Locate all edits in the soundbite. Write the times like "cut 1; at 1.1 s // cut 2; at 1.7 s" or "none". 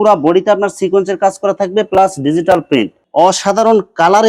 cut 1; at 3.0 s